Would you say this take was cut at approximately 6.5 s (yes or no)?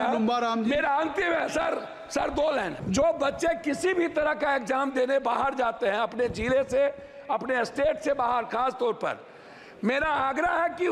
no